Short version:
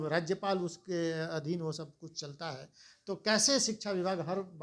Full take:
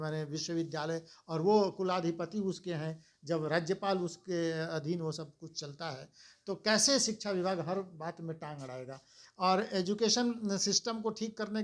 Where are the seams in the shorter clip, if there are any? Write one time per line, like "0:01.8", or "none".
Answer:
none